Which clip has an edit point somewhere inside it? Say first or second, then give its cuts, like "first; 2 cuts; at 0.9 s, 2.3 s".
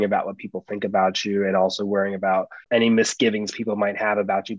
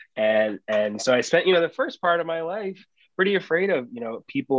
first; 1 cut; at 2.6 s